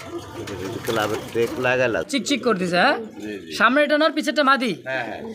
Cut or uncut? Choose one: cut